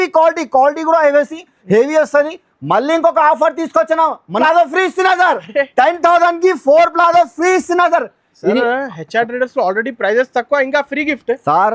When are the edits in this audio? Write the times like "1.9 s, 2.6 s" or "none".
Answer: 4.4 s